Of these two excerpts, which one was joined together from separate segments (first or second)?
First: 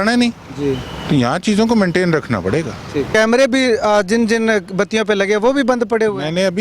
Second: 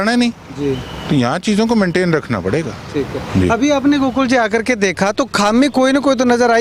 first